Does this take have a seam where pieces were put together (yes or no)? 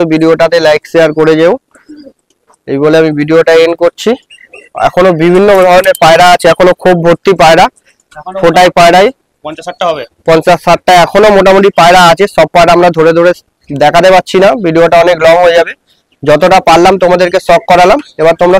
no